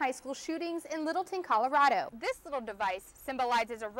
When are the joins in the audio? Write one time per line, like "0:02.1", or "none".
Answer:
0:02.1